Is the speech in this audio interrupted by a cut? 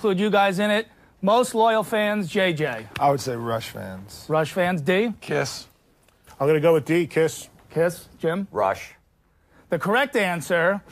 no; 0 cuts

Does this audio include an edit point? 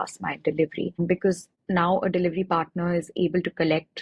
yes; 1 cut; at 1.2 s

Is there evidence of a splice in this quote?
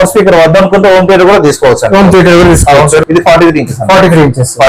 yes; 1 cut; at 3.0 s

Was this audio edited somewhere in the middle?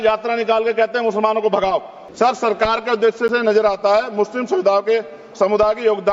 yes; 1 cut; at 2.0 s

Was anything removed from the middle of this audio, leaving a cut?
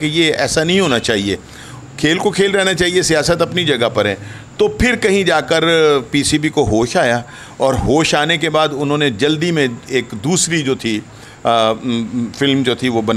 no; 0 cuts

